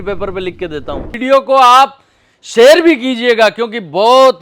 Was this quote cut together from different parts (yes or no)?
yes